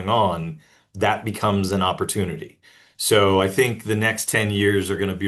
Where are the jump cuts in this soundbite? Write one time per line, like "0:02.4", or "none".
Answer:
none